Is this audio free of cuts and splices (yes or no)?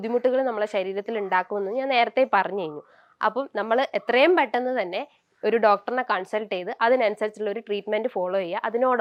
yes